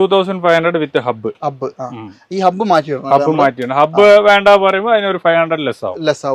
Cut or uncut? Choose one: uncut